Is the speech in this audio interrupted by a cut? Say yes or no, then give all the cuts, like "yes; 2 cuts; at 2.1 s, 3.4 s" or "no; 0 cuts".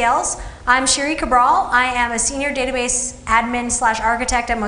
no; 0 cuts